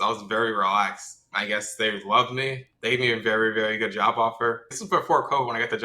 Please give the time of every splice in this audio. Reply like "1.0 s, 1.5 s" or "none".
1.3 s, 2.7 s, 4.7 s